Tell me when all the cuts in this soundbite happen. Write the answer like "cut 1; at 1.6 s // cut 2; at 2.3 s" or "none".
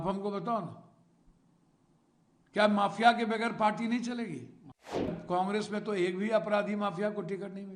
cut 1; at 5.1 s

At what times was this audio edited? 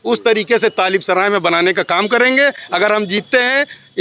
none

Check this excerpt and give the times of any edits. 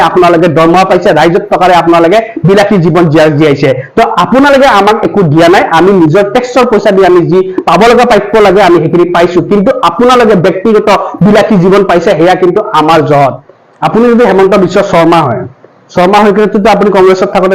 cut 1; at 13.5 s

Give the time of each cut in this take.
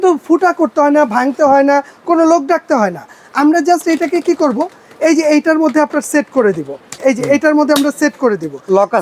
cut 1; at 7.0 s

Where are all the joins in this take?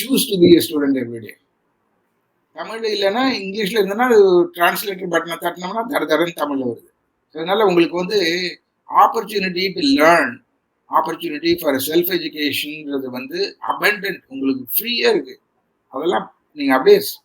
cut 1; at 2.8 s

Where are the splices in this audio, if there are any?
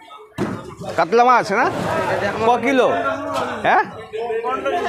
cut 1; at 1.8 s

